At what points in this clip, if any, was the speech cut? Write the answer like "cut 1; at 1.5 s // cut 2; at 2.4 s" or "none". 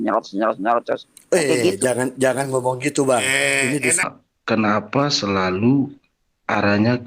cut 1; at 4.0 s

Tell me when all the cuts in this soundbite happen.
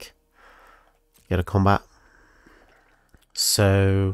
cut 1; at 2.7 s

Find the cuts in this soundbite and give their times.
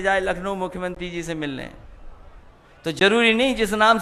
none

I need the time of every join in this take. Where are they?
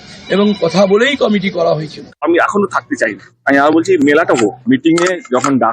none

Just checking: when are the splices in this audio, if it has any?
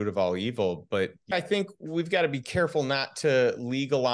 cut 1; at 1.3 s

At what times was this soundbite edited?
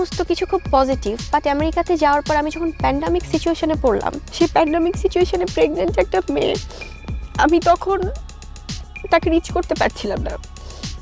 cut 1; at 4.2 s

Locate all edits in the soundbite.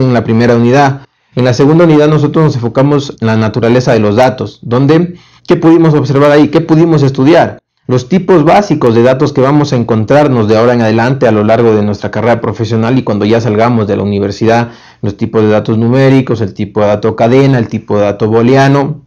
cut 1; at 12.6 s

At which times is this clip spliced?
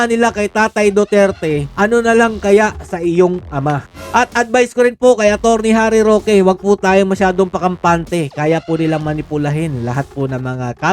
cut 1; at 3.9 s

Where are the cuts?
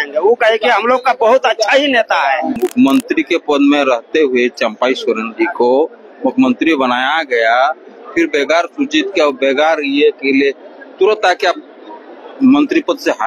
cut 1; at 2.6 s

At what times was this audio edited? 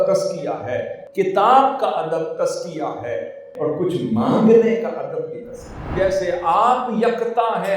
cut 1; at 1.0 s // cut 2; at 3.5 s // cut 3; at 5.8 s

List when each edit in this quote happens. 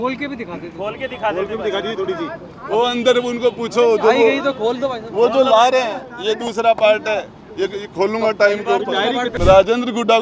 cut 1; at 9.3 s

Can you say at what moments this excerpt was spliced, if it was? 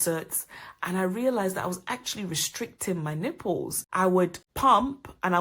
cut 1; at 4.2 s

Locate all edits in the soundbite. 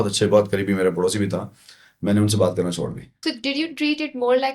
cut 1; at 3.2 s

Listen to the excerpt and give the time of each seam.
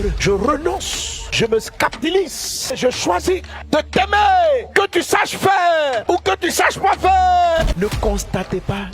cut 1; at 7.7 s

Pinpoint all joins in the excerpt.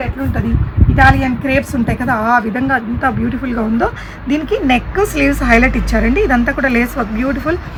none

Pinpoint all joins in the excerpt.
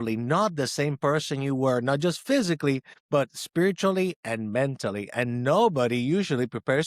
cut 1; at 2.9 s

